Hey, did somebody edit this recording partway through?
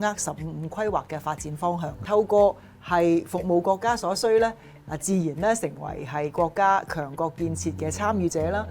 yes; 1 cut; at 2.0 s

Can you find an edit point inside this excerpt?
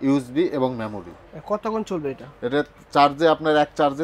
no; 0 cuts

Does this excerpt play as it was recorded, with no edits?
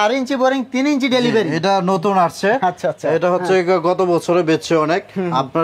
yes; 0 cuts

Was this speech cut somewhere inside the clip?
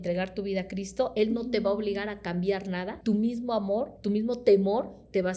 yes; 2 cuts; at 2.9 s, 3.9 s

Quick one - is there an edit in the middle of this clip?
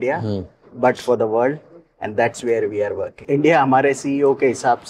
yes; 1 cut; at 3.2 s

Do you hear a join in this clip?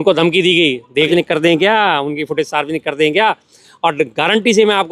yes; 1 cut; at 1.1 s

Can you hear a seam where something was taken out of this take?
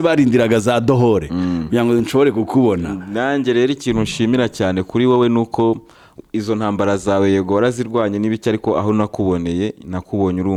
no; 0 cuts

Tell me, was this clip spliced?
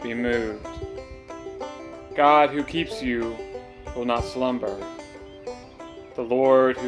yes; 2 cuts; at 4.7 s, 6.1 s

